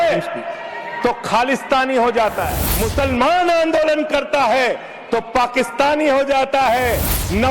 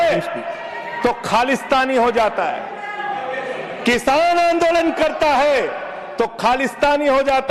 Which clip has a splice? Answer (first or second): first